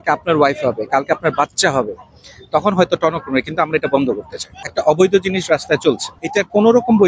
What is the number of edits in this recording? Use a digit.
2